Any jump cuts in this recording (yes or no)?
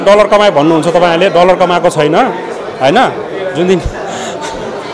no